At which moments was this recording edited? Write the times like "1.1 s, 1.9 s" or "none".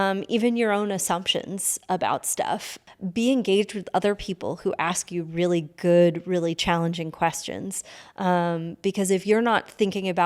2.8 s